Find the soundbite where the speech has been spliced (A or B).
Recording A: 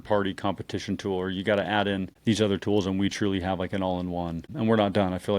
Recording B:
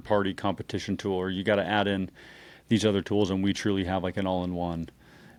A